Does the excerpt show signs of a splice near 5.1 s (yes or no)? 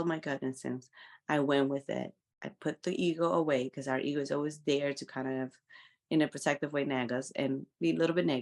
no